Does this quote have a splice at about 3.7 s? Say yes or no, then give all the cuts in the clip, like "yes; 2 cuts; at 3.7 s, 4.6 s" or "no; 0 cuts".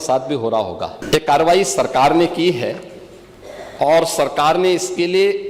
no; 1 cut; at 1.0 s